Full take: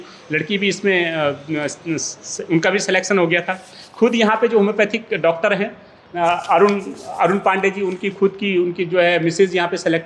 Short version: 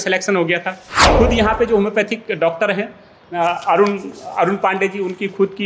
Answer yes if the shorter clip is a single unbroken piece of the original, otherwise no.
yes